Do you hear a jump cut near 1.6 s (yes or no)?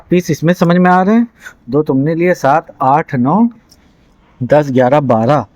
no